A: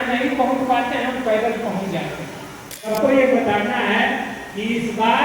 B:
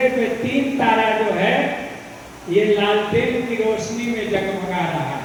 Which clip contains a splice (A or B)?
A